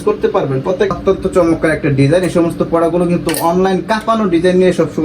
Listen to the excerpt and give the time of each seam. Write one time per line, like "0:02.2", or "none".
0:00.9